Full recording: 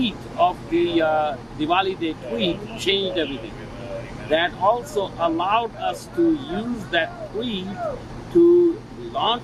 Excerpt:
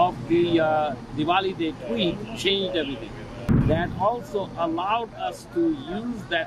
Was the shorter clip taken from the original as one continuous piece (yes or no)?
no